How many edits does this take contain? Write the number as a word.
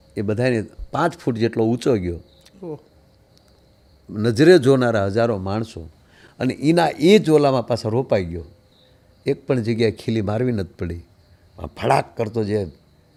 zero